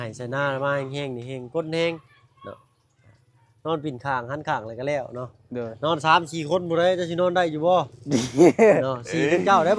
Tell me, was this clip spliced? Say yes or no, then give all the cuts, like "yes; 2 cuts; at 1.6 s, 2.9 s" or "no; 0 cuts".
no; 0 cuts